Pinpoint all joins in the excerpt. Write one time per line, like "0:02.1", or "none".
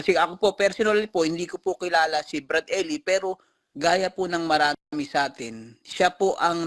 none